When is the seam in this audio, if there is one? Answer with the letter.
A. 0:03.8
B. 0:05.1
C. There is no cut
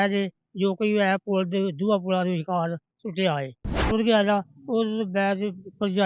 A